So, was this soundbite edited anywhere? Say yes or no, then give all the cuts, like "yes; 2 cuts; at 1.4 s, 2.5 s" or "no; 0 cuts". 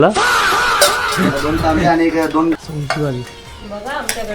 yes; 1 cut; at 2.6 s